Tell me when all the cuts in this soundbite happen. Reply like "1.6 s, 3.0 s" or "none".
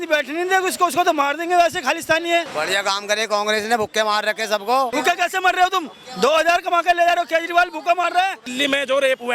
2.5 s, 4.9 s, 8.5 s